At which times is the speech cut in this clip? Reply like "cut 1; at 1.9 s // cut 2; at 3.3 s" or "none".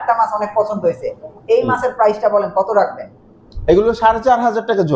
none